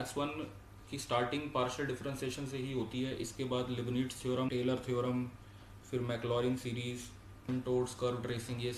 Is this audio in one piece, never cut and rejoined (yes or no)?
no